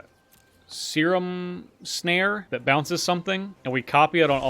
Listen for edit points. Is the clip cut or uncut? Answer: cut